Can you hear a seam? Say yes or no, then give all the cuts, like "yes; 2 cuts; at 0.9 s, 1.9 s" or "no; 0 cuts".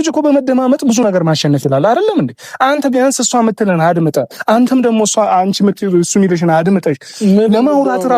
no; 0 cuts